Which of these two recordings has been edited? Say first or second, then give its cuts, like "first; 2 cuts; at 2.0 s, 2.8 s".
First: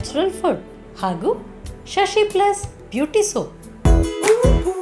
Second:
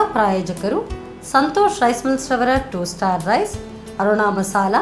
first; 1 cut; at 3.6 s